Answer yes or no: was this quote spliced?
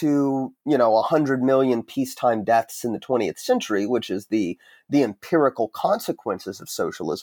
no